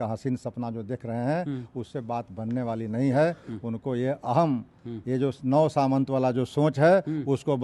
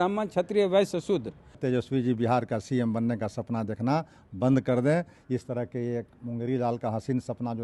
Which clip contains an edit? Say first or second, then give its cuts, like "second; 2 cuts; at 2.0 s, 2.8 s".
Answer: second; 1 cut; at 1.5 s